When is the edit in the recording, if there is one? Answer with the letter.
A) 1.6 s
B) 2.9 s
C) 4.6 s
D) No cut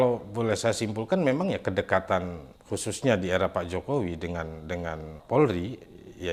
D